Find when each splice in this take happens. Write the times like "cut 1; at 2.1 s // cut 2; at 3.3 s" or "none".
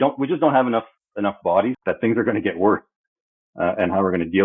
cut 1; at 1.8 s